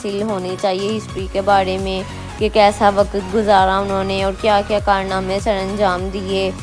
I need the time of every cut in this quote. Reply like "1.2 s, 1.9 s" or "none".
none